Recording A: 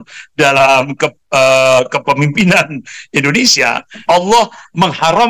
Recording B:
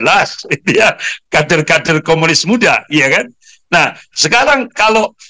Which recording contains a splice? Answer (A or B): A